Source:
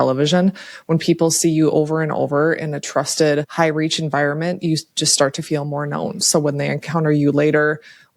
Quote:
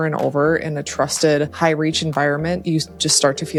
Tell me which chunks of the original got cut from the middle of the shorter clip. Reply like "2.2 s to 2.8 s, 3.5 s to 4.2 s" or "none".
none